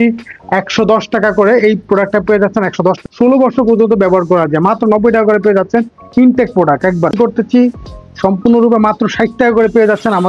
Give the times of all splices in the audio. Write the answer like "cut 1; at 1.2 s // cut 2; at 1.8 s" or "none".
cut 1; at 3.0 s // cut 2; at 7.1 s

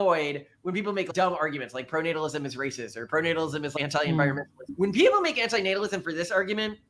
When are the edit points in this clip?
cut 1; at 1.1 s // cut 2; at 3.7 s // cut 3; at 4.6 s

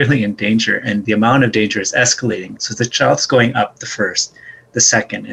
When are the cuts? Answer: cut 1; at 1.0 s // cut 2; at 2.5 s

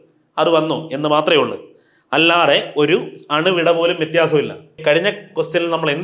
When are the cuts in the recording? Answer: cut 1; at 4.8 s

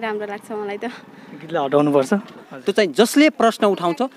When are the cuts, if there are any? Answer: cut 1; at 2.5 s

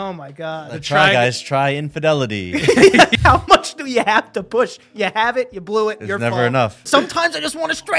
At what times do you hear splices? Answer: cut 1; at 3.1 s // cut 2; at 6.8 s

